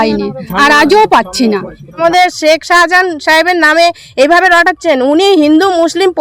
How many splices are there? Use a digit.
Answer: 1